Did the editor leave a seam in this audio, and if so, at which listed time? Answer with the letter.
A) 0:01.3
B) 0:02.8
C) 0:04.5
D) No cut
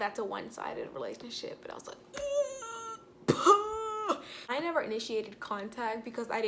C